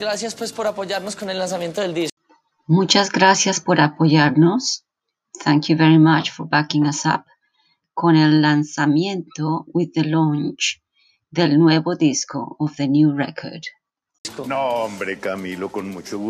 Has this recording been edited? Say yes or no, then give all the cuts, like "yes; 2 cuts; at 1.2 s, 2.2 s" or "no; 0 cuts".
no; 0 cuts